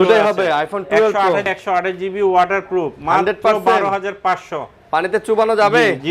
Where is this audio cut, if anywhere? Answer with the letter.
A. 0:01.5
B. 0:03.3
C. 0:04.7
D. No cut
A